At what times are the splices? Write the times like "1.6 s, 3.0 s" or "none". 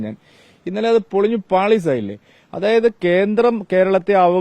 none